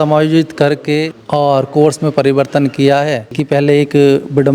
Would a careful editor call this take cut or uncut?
cut